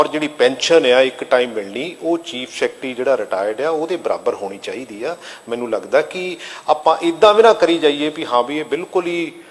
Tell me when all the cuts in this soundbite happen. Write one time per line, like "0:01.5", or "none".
none

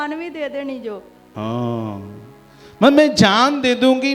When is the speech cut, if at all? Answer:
0:01.3

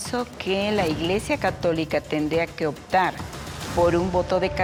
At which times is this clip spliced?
none

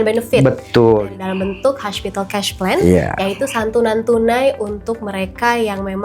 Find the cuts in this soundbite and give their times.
0:01.0

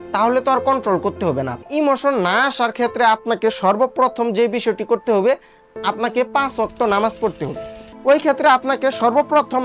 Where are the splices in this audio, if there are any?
0:01.6
0:07.9

